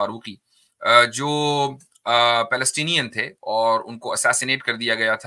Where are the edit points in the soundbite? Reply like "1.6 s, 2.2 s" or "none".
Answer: none